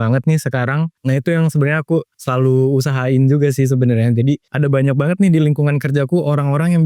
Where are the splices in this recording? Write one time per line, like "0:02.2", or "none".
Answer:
0:01.0
0:02.2
0:04.5

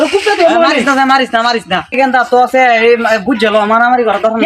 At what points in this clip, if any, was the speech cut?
0:01.8

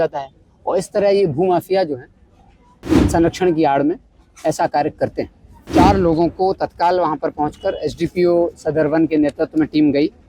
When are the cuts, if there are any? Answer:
0:05.6

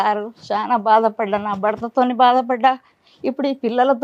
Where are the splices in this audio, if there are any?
none

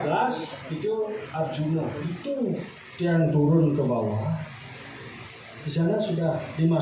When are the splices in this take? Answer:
0:02.1

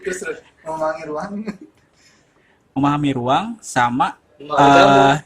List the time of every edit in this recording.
none

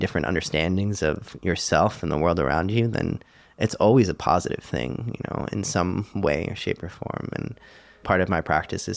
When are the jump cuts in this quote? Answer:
0:08.0

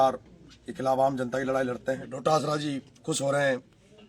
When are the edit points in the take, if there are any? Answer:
0:02.1

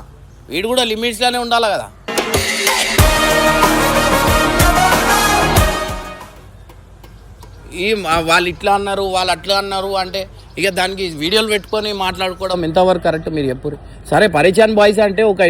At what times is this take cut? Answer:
none

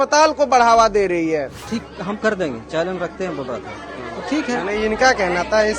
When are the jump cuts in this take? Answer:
0:01.6

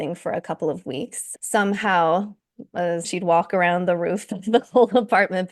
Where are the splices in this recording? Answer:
0:03.1

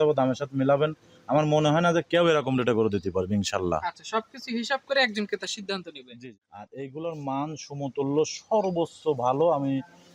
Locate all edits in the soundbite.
0:06.0
0:08.0

